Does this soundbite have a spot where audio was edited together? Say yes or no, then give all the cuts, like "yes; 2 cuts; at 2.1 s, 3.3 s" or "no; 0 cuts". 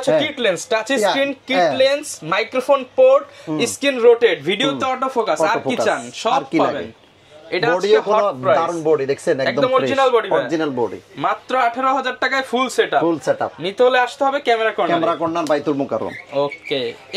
no; 0 cuts